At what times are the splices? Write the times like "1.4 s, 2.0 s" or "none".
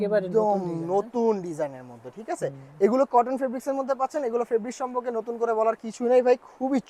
none

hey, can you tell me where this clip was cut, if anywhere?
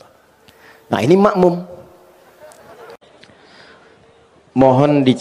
2.8 s

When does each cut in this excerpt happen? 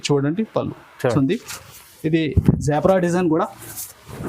1.1 s

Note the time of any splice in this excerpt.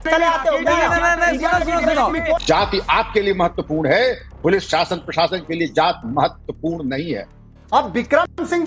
1.1 s, 2.4 s, 7.6 s

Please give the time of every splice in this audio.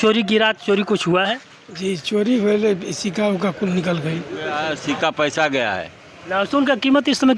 4.7 s

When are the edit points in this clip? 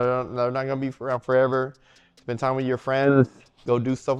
none

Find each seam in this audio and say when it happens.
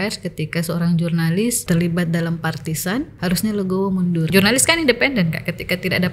1.6 s, 3.1 s, 4.3 s

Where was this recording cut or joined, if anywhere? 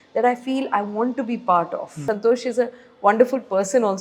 2.0 s

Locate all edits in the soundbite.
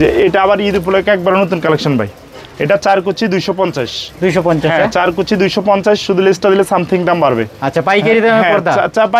none

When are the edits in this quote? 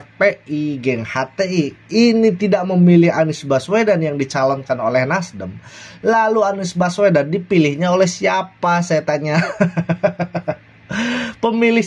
none

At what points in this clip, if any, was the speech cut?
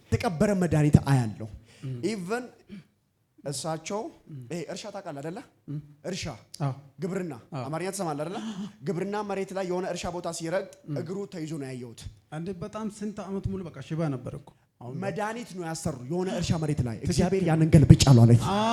none

